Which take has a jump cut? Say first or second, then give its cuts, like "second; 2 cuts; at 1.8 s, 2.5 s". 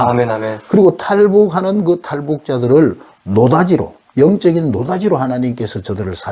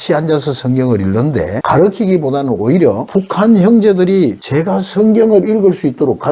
second; 3 cuts; at 1.6 s, 3.0 s, 4.4 s